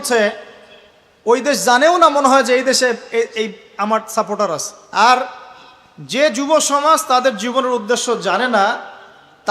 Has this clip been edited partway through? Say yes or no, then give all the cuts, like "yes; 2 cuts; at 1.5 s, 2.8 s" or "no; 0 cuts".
yes; 1 cut; at 4.8 s